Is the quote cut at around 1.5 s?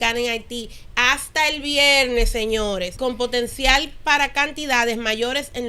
no; 1 cut; at 2.9 s

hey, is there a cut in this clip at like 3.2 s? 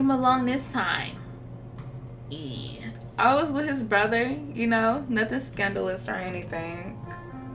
no; 0 cuts

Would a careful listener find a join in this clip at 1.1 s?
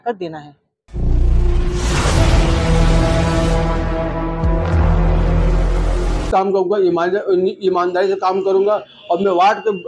yes; 2 cuts; at 1.1 s, 6.3 s

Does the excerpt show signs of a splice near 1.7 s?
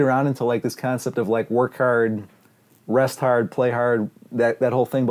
no; 0 cuts

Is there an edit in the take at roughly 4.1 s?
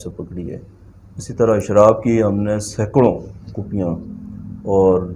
no; 0 cuts

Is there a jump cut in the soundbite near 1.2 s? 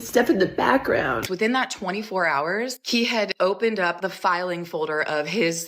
yes; 1 cut; at 1.2 s

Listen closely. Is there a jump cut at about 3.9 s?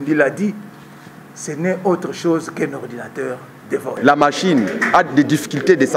yes; 1 cut; at 3.9 s

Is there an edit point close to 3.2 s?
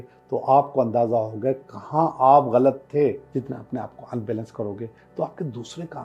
yes; 1 cut; at 3.2 s

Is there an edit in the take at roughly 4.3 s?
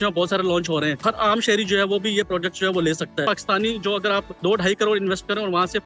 yes; 3 cuts; at 1.0 s, 3.2 s, 4.3 s

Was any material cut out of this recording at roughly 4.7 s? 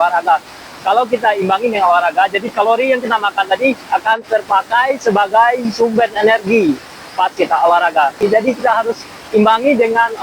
no; 1 cut; at 8.2 s

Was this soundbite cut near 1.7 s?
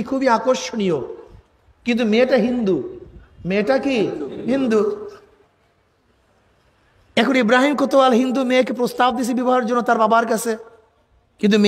no; 0 cuts

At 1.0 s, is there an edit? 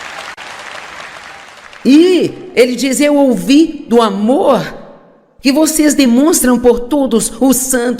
no; 1 cut; at 4.3 s

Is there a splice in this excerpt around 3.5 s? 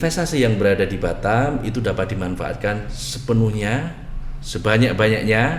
no; 0 cuts

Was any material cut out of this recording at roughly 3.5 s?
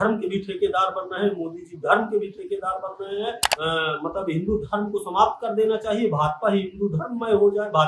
yes; 1 cut; at 3.5 s

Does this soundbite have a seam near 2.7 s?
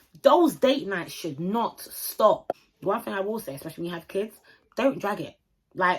yes; 1 cut; at 2.7 s

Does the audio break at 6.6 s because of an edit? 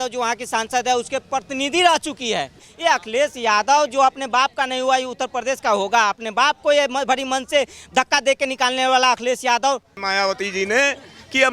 no; 2 cuts; at 2.6 s, 10.0 s

